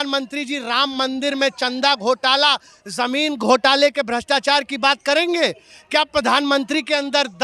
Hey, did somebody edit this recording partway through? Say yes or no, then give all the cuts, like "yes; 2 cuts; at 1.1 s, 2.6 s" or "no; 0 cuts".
no; 0 cuts